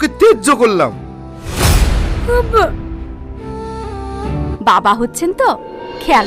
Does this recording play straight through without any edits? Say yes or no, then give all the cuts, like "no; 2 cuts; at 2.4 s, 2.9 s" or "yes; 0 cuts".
no; 1 cut; at 4.5 s